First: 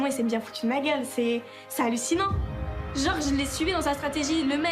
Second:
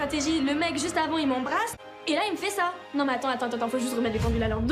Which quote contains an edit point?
second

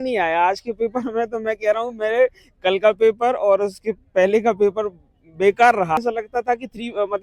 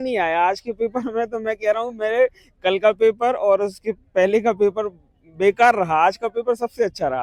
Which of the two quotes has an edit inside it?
first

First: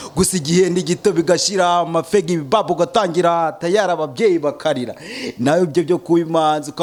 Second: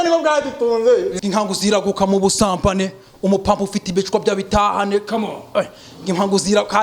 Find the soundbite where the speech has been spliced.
second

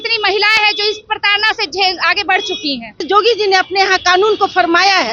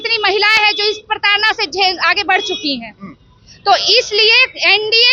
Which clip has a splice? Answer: first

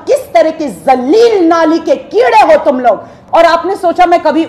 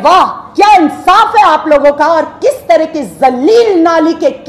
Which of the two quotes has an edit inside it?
first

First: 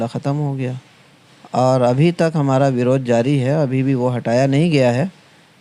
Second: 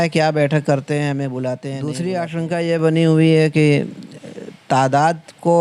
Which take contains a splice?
second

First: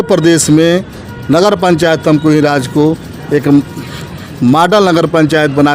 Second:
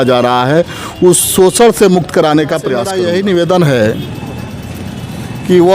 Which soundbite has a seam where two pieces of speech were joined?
second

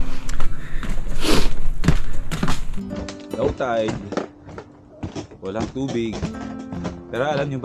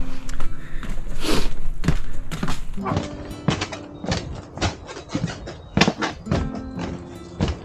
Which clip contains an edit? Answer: first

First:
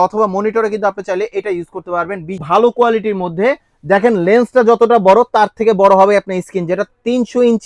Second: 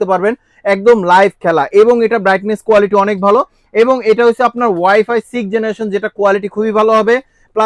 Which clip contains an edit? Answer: first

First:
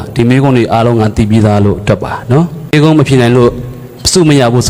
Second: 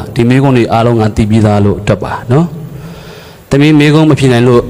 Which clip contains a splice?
first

